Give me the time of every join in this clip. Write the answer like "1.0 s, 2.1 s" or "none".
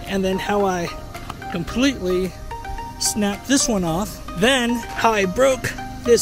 4.2 s